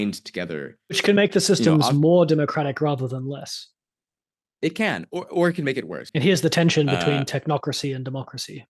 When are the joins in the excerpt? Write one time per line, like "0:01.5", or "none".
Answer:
0:01.0
0:06.0